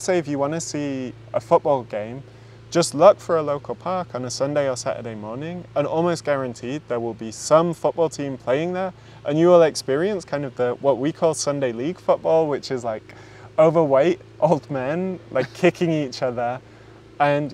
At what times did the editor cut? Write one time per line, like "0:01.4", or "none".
none

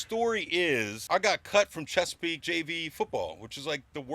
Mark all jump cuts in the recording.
0:01.0
0:02.4

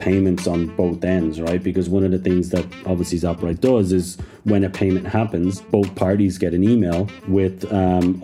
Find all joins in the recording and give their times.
0:05.7
0:07.1

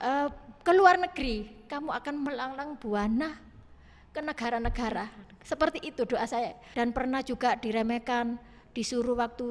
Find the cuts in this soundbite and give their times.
0:06.6

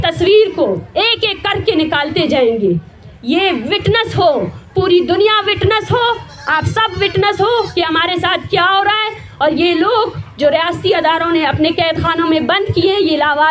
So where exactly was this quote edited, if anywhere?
none

